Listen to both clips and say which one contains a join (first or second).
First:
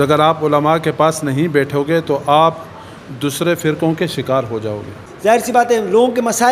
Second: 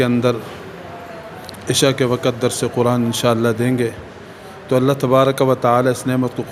first